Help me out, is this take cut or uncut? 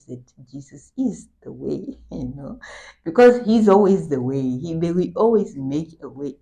uncut